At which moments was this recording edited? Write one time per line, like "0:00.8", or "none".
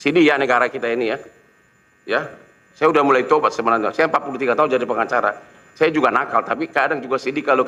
none